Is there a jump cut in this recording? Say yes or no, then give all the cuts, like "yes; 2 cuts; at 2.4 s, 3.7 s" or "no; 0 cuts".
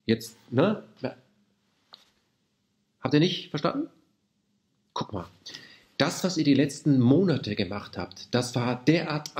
no; 0 cuts